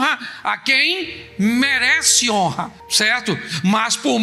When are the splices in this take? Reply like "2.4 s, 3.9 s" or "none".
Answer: none